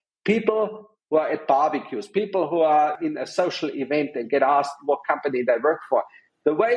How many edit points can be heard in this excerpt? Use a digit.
0